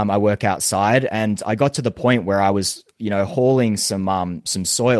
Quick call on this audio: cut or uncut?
uncut